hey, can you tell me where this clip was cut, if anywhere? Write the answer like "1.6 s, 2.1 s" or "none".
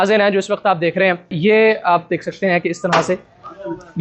1.4 s